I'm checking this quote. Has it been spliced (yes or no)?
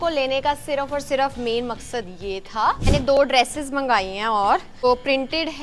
yes